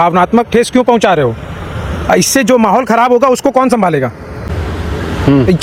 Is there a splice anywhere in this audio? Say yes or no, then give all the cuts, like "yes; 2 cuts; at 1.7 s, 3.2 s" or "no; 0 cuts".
no; 0 cuts